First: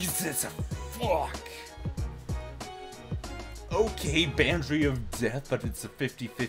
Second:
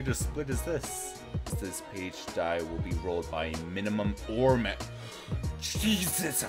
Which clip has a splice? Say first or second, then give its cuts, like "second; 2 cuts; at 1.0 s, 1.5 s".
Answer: second; 1 cut; at 1.5 s